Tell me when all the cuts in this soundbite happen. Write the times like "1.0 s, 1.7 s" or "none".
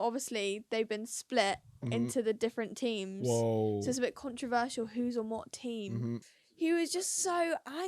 6.3 s